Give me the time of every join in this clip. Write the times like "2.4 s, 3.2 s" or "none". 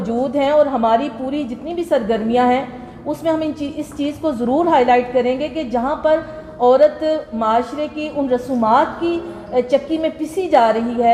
none